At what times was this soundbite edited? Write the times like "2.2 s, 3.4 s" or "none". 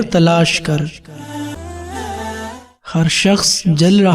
1.5 s